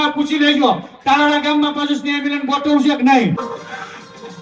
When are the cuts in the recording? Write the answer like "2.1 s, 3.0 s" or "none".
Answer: 3.4 s